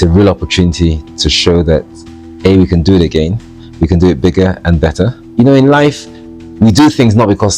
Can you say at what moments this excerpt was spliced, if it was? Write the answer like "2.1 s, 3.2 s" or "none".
5.2 s